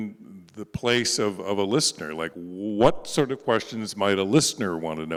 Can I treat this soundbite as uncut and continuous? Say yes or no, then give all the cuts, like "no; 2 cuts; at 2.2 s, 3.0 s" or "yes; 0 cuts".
yes; 0 cuts